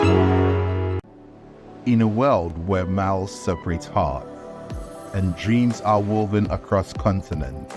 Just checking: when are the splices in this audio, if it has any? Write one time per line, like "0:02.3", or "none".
0:01.1

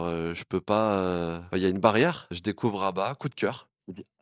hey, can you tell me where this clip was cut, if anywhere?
0:01.4
0:02.8

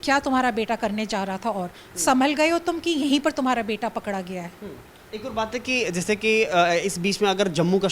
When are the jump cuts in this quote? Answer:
none

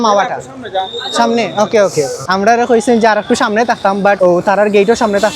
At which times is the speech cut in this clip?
0:02.2
0:04.2

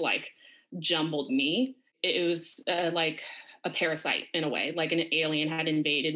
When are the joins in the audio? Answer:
0:01.9

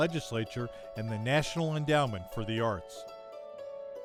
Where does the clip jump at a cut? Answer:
none

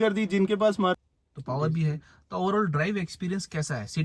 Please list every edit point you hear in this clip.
0:00.9

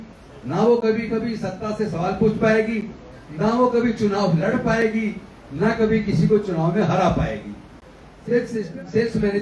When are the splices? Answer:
0:08.5

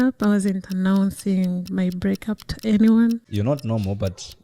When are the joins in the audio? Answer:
0:03.3

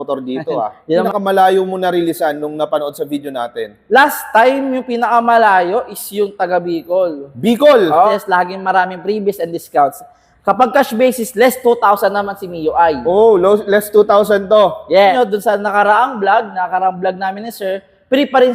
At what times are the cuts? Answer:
0:01.1
0:08.1
0:15.1

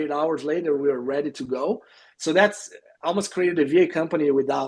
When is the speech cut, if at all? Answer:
none

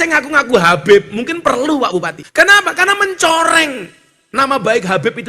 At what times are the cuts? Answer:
0:02.2

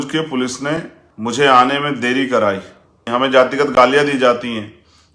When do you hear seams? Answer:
0:01.0
0:03.1

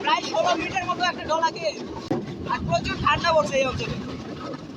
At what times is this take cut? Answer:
0:02.0

